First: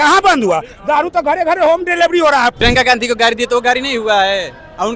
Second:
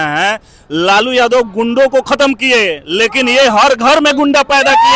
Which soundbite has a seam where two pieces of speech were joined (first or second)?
first